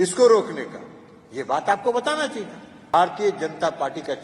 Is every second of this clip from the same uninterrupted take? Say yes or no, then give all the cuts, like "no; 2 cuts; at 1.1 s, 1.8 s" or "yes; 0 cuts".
no; 1 cut; at 2.9 s